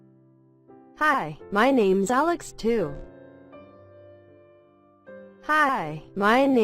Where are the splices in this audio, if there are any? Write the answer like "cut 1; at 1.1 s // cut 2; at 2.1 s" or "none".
cut 1; at 1.0 s // cut 2; at 2.9 s // cut 3; at 5.5 s